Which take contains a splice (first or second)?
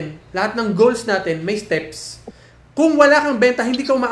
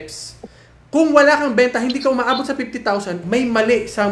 second